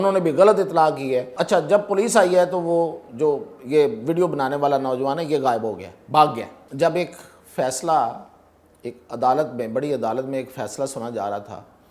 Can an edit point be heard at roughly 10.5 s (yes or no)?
no